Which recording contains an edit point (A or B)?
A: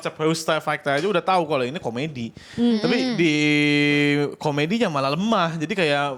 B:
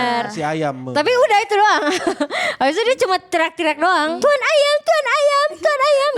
B